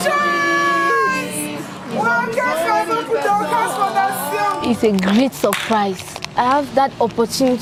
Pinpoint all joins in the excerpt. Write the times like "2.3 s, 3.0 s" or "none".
none